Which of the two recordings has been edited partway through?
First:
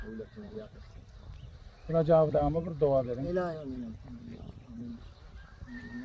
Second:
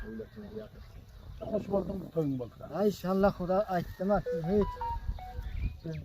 second; 1 cut; at 1.4 s

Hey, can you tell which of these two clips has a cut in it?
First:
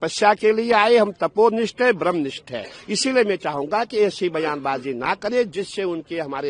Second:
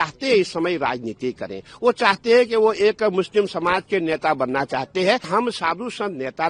second; 1 cut; at 5.3 s

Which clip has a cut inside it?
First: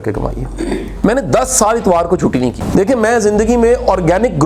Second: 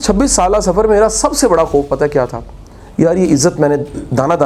first; 2 cuts; at 0.9 s, 2.6 s

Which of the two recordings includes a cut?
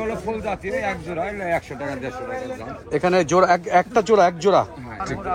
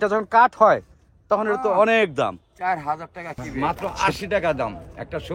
second; 1 cut; at 3.5 s

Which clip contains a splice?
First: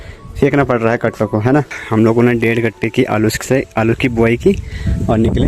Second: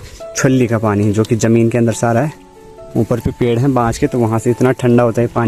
first; 1 cut; at 1.8 s

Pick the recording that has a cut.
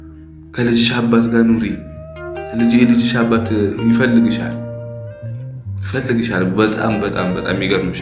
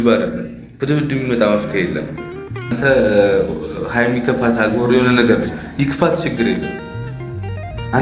second; 1 cut; at 2.8 s

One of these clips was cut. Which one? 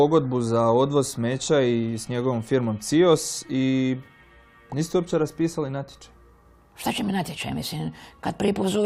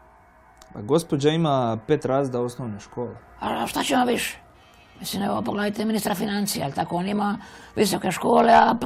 second; 1 cut; at 3.1 s

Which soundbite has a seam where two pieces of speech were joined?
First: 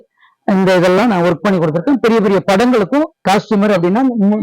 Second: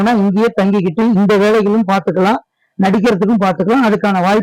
first; 1 cut; at 3.2 s

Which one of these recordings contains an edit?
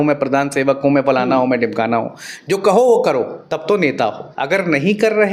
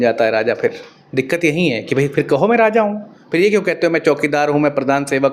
first; 2 cuts; at 3.4 s, 4.2 s

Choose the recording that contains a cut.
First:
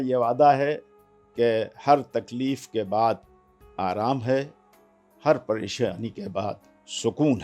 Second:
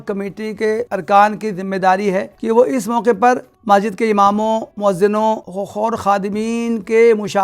second; 5 cuts; at 0.9 s, 2.3 s, 3.5 s, 4.7 s, 5.5 s

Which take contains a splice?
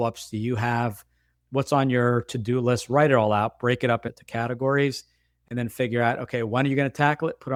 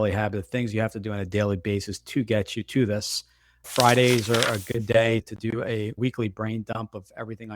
second; 1 cut; at 3.5 s

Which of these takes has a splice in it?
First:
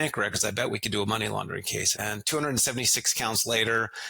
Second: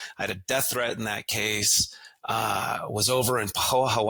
first; 1 cut; at 1.9 s

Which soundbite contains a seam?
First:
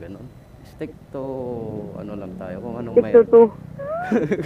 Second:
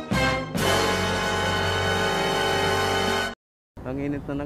second; 1 cut; at 3.4 s

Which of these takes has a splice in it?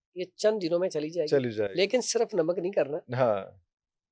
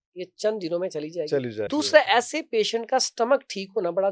second; 1 cut; at 1.7 s

